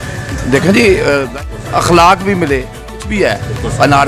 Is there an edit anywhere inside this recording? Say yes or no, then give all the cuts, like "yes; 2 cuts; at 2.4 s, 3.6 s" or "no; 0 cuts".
yes; 2 cuts; at 1.3 s, 3.1 s